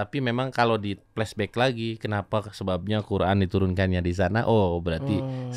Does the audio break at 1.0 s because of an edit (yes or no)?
yes